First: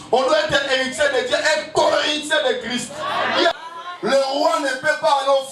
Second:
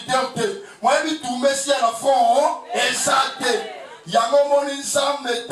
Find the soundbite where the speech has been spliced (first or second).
first